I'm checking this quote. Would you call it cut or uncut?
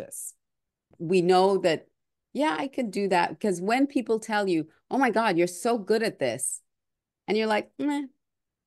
cut